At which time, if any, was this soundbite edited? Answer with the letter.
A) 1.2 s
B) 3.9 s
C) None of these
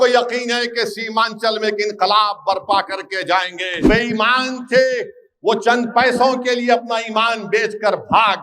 B